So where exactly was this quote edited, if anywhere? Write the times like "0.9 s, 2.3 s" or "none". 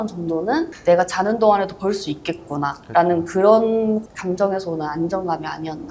none